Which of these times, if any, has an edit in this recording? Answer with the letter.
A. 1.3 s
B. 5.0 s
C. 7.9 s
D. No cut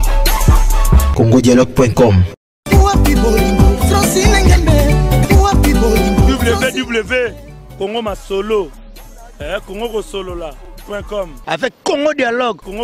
D